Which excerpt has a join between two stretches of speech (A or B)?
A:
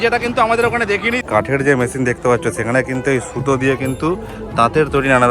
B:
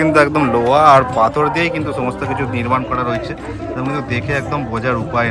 A